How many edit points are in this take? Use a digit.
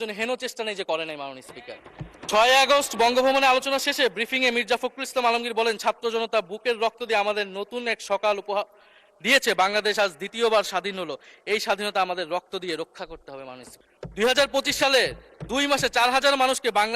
2